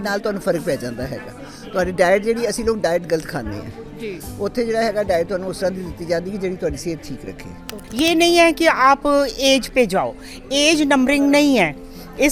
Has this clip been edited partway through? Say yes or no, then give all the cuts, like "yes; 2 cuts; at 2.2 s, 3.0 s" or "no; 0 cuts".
yes; 1 cut; at 7.7 s